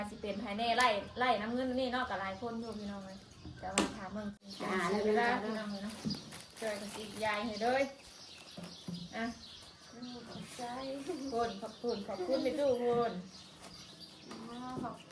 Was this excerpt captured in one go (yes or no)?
no